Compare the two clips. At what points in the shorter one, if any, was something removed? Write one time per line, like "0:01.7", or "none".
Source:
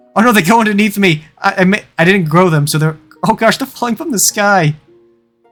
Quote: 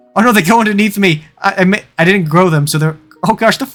none